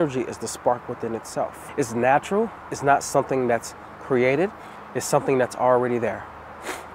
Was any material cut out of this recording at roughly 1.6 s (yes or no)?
yes